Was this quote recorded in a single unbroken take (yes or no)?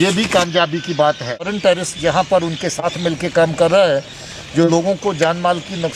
no